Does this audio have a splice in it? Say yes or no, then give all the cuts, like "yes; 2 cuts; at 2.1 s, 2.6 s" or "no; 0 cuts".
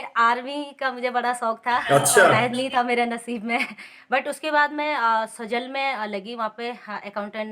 yes; 1 cut; at 2.4 s